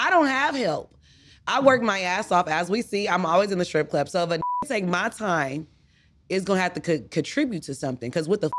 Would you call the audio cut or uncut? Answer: uncut